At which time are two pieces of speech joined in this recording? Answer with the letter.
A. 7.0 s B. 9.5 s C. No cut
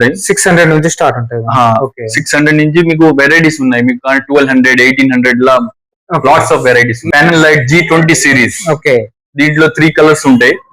A